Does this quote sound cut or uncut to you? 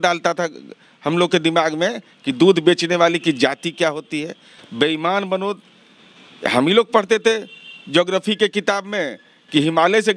uncut